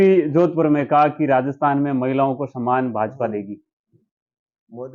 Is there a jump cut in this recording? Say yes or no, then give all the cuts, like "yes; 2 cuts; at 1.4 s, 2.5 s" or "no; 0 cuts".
no; 0 cuts